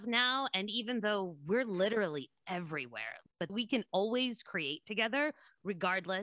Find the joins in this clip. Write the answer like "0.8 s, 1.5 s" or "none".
3.5 s